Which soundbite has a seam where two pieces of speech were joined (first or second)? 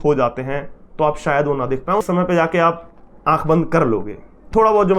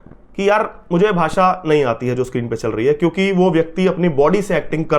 first